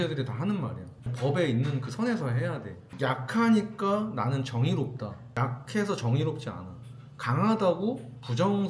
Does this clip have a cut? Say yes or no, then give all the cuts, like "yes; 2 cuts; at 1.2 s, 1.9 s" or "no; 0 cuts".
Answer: no; 0 cuts